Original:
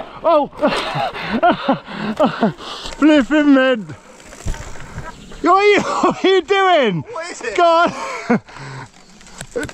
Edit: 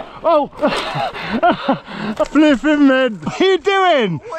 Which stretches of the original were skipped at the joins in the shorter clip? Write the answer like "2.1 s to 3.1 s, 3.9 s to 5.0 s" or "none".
2.2 s to 2.9 s, 4.0 s to 6.2 s